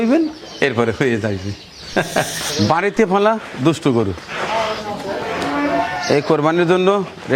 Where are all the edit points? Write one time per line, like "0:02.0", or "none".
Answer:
0:02.5